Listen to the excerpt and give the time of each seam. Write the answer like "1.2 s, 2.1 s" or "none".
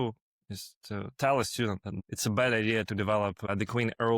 1.9 s, 3.5 s